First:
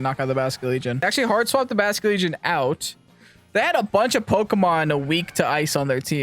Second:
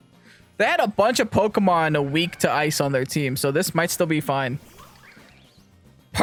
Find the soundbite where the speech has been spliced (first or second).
first